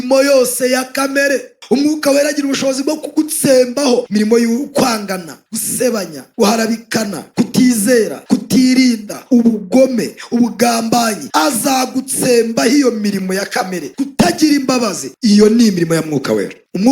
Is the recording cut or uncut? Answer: cut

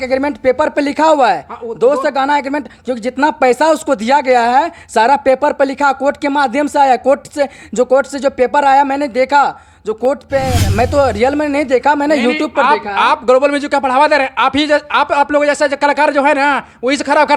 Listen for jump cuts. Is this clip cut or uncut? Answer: uncut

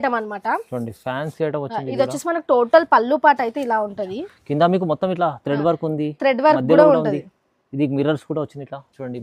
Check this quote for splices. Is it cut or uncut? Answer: uncut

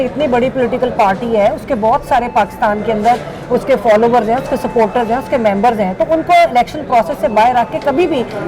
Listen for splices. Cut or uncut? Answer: uncut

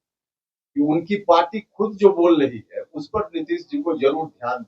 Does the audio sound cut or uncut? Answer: uncut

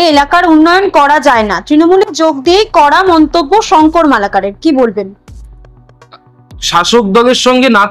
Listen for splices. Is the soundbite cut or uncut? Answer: uncut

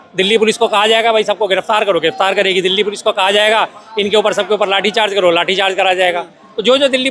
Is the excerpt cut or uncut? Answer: uncut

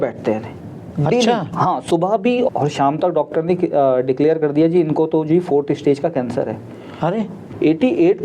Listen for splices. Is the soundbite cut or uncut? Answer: cut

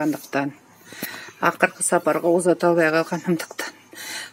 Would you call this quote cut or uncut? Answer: uncut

